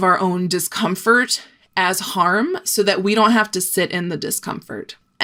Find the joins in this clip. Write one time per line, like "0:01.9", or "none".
none